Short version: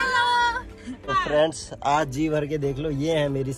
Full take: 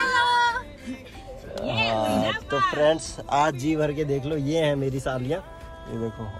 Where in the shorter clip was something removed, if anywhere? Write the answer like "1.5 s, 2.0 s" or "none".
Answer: 1.0 s